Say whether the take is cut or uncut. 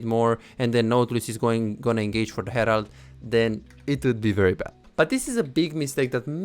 cut